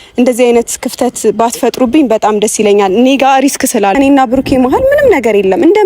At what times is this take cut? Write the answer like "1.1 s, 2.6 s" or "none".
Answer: 4.0 s

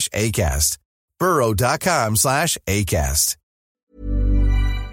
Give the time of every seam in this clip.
3.9 s

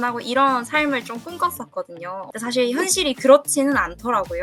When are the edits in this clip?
2.2 s

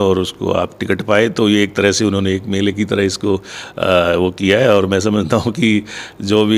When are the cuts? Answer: none

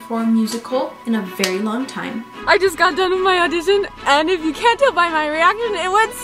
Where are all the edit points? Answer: 1.0 s, 2.3 s

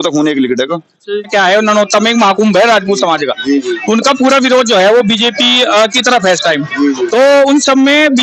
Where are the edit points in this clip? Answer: 1.3 s, 7.1 s

